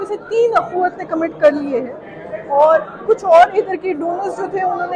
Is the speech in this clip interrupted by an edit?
no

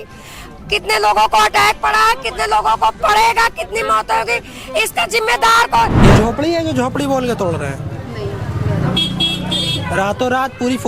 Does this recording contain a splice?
yes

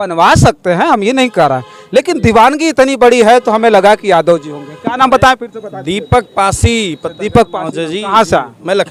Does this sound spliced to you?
no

